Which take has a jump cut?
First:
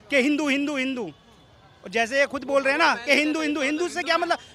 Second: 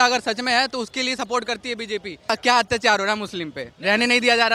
second; 1 cut; at 2.3 s

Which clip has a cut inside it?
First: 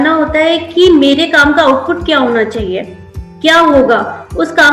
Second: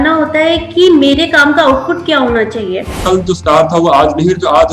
second; 1 cut; at 3.0 s

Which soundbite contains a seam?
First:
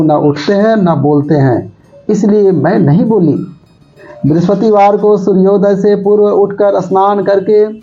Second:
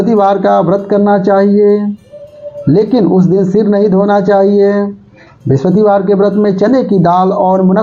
first; 1 cut; at 3.7 s

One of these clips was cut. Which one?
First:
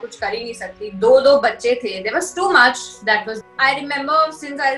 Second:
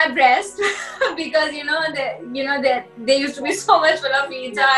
first; 1 cut; at 3.4 s

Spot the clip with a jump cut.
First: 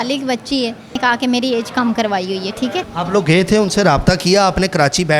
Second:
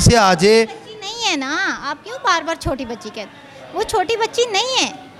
first; 2 cuts; at 1.0 s, 2.9 s

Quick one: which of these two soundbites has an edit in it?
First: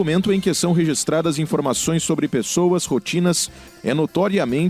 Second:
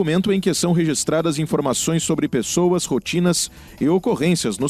first; 1 cut; at 3.6 s

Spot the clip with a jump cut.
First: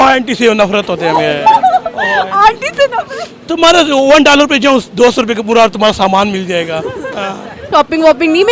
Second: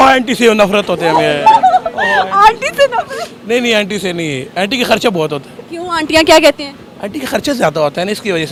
first; 2 cuts; at 3.3 s, 7.6 s

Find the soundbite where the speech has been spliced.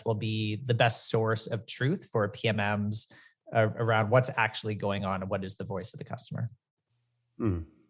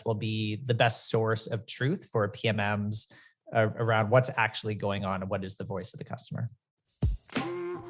second; 1 cut; at 6.9 s

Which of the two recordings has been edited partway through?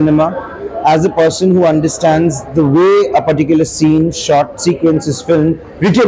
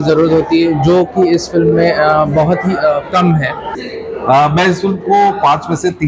second; 1 cut; at 3.7 s

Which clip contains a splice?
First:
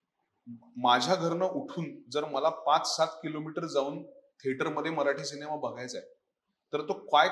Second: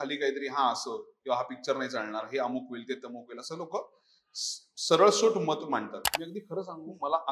second; 1 cut; at 6.0 s

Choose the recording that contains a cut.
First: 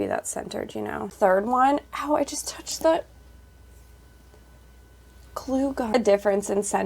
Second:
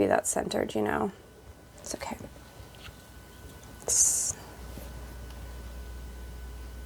first; 2 cuts; at 1.1 s, 5.9 s

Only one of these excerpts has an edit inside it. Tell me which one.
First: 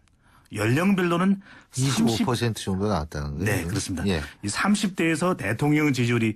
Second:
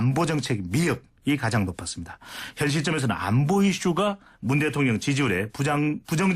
second; 1 cut; at 2.6 s

